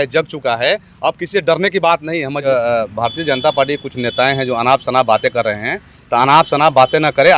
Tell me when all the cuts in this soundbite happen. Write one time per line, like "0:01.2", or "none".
0:02.4